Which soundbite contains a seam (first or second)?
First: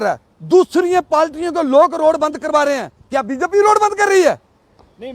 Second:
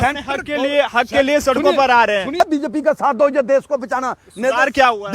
second